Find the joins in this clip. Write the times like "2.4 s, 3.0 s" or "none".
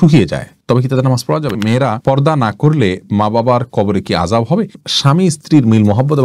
1.6 s, 4.8 s